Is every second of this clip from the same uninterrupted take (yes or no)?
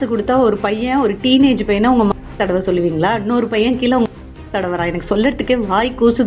yes